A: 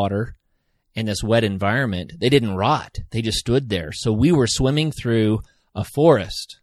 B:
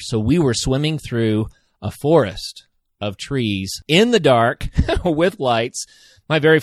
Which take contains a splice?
B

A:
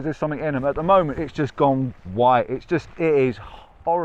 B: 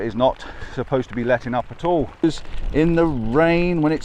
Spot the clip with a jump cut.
B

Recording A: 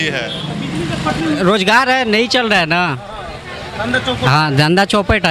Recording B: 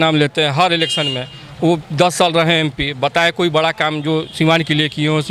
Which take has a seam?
A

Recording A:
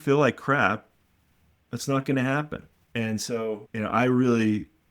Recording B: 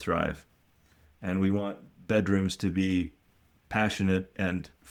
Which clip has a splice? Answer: A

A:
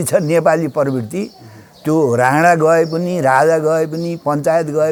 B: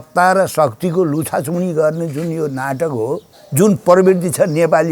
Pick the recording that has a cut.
B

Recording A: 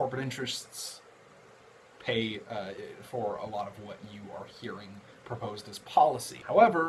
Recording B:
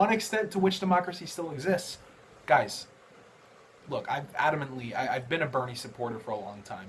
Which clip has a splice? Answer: B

